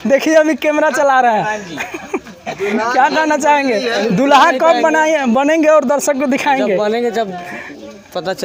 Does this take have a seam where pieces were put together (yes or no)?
no